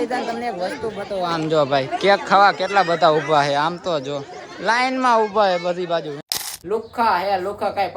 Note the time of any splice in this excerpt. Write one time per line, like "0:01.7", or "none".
0:06.5